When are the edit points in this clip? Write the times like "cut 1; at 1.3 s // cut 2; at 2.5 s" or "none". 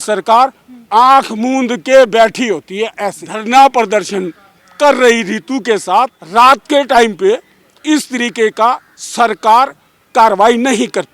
cut 1; at 3.3 s // cut 2; at 6.2 s